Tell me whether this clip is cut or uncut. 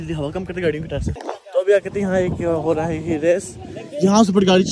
cut